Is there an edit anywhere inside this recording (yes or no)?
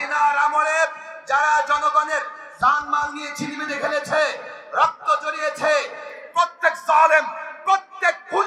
yes